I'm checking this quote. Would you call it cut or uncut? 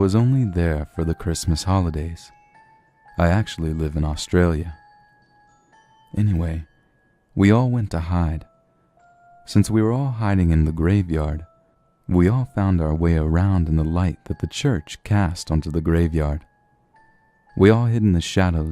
uncut